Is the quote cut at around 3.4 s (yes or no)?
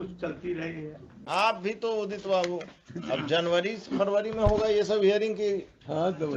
no